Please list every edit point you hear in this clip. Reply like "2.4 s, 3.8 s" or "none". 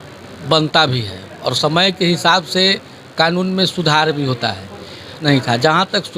5.2 s